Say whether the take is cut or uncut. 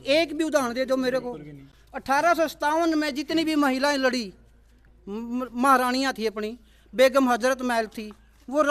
uncut